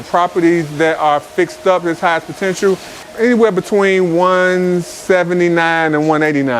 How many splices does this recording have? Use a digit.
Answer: 1